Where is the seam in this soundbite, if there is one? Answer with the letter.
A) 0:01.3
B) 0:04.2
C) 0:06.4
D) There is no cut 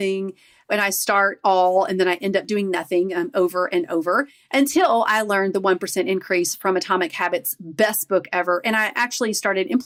D